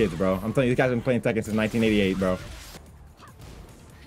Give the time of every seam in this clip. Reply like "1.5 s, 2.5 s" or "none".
2.8 s